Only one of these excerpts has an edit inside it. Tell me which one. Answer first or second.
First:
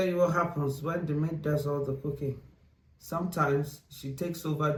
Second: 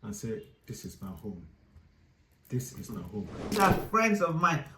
second